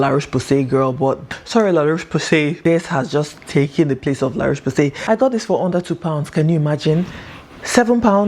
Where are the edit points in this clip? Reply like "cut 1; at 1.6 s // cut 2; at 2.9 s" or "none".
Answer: cut 1; at 1.2 s // cut 2; at 2.6 s // cut 3; at 5.0 s